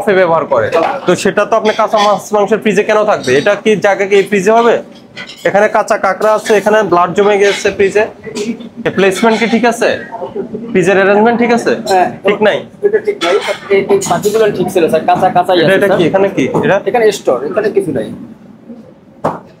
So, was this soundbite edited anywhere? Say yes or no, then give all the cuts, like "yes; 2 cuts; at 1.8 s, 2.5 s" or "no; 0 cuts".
no; 0 cuts